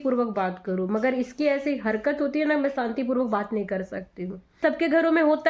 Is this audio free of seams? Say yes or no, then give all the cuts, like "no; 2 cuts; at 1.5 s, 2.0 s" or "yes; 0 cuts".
no; 1 cut; at 4.6 s